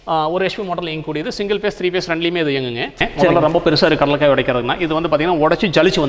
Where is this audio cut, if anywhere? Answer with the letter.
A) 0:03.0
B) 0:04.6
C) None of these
A